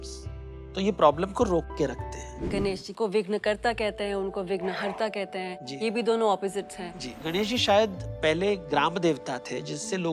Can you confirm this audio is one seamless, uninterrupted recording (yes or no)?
no